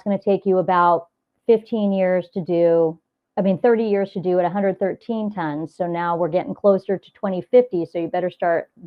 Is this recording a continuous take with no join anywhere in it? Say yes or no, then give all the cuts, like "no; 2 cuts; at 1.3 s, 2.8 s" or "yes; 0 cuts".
yes; 0 cuts